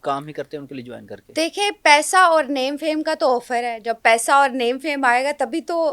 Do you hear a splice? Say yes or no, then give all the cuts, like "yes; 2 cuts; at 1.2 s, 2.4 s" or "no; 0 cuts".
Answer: no; 0 cuts